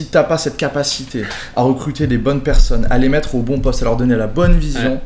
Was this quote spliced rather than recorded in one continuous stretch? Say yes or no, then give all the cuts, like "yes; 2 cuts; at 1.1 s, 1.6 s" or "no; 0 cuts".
no; 0 cuts